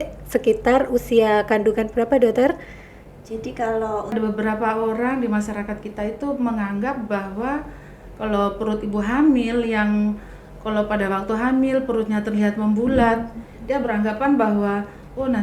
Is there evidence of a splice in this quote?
yes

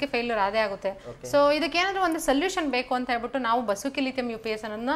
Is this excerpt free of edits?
yes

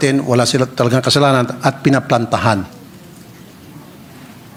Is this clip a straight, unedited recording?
yes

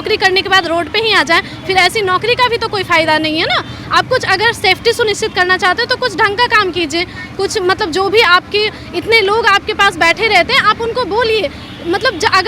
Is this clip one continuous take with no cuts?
yes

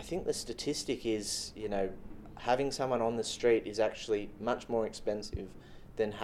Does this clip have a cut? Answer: no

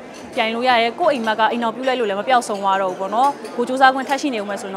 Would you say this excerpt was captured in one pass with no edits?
yes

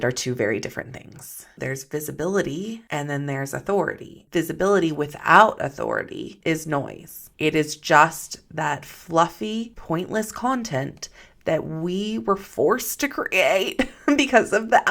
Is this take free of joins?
no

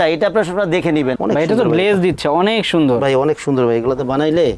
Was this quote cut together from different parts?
yes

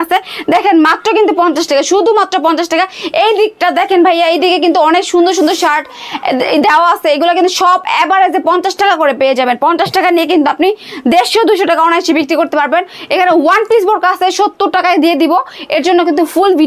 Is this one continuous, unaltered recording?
yes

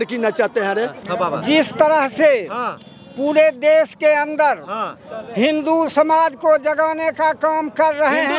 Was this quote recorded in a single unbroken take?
no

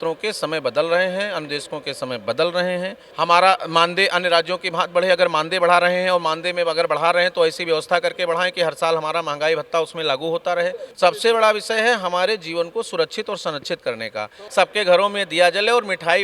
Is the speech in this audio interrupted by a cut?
yes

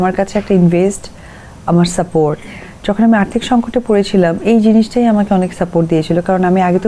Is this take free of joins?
yes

